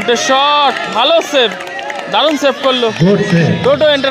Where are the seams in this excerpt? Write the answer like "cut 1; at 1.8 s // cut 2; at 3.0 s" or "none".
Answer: cut 1; at 2.6 s

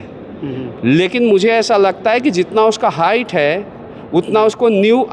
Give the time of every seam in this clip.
none

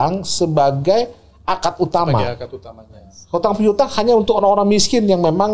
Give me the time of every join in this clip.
none

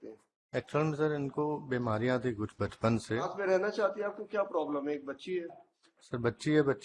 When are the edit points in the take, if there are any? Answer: cut 1; at 3.3 s

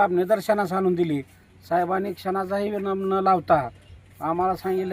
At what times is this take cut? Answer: none

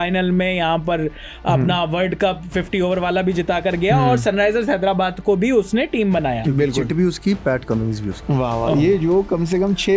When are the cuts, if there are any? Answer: none

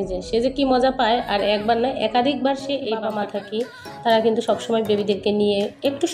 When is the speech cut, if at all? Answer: cut 1; at 3.1 s

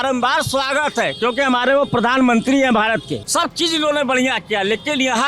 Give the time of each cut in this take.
cut 1; at 3.2 s

